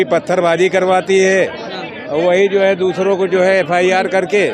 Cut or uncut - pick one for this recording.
uncut